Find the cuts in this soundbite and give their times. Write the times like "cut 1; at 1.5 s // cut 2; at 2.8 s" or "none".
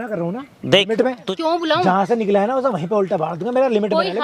cut 1; at 1.2 s